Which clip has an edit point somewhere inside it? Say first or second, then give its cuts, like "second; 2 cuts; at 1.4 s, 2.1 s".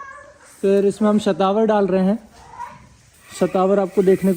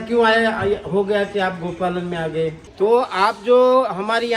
second; 1 cut; at 2.6 s